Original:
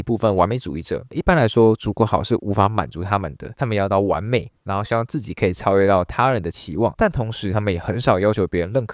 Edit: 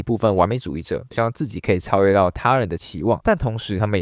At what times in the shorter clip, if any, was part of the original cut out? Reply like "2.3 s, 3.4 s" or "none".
1.1 s